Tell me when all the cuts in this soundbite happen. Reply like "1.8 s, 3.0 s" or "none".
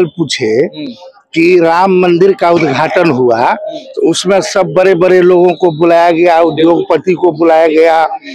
none